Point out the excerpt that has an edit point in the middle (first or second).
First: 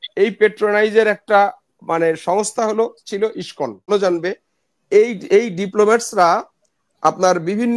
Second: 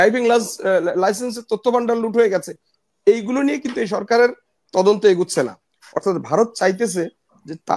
first